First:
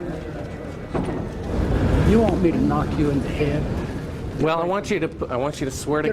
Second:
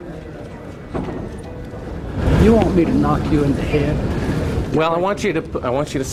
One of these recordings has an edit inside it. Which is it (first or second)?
first